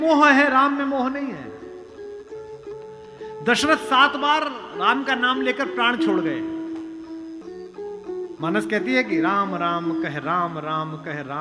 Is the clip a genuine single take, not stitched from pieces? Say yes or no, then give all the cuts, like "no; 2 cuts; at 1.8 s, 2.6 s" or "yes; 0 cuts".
no; 1 cut; at 7.4 s